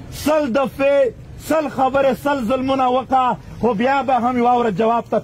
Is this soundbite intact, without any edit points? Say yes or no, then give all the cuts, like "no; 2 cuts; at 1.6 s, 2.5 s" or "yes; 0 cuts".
yes; 0 cuts